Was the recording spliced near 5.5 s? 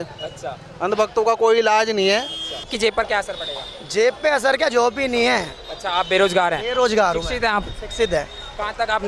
no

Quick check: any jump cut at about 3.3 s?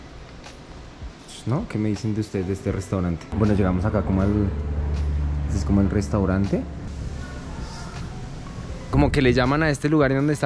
yes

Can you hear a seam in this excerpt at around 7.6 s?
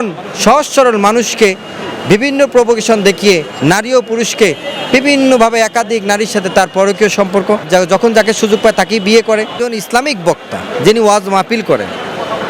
yes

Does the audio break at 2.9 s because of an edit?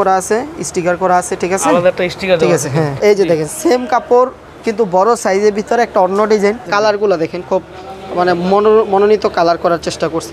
yes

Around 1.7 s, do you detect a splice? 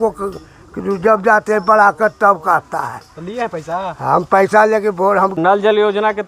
no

